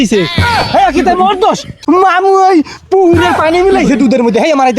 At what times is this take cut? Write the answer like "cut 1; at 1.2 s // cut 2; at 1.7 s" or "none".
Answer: cut 1; at 1.8 s